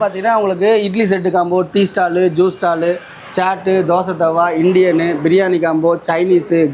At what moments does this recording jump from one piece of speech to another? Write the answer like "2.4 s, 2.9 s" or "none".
none